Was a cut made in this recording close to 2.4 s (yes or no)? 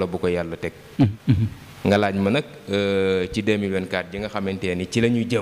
no